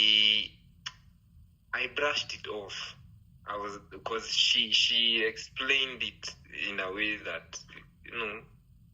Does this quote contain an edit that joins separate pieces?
no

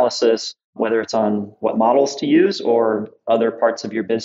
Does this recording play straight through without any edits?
no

